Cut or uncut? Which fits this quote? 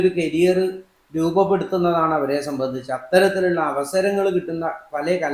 uncut